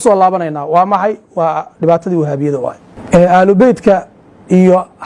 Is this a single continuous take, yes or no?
no